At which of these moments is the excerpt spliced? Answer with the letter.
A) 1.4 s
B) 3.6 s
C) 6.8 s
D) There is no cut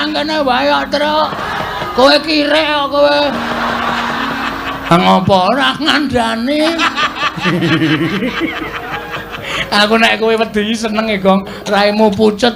A